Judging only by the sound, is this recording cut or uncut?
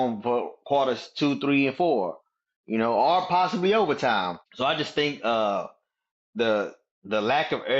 cut